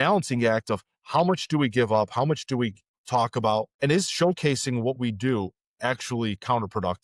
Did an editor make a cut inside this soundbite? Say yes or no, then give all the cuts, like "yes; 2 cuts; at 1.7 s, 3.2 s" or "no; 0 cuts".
yes; 2 cuts; at 2.9 s, 3.7 s